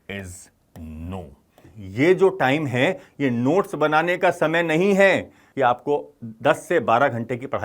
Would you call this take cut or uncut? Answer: cut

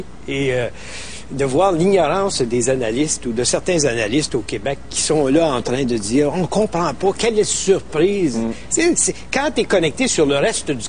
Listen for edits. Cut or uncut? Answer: uncut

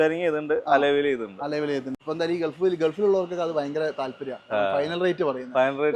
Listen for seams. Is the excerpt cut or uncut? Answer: cut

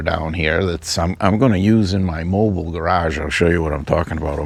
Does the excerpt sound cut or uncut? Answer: uncut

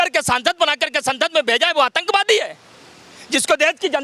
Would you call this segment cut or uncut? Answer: uncut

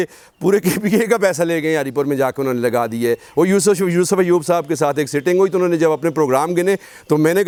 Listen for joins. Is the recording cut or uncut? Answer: uncut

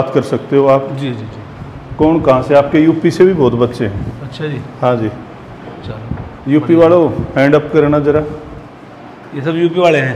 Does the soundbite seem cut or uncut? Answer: uncut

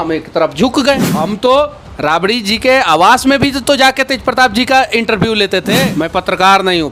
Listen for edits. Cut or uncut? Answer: cut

